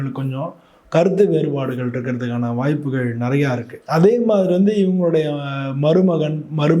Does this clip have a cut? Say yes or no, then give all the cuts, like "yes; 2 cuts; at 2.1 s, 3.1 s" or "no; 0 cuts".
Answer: yes; 1 cut; at 3.7 s